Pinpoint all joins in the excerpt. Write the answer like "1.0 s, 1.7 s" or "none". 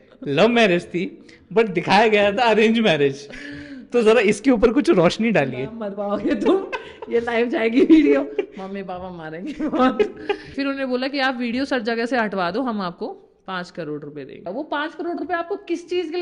10.5 s, 14.4 s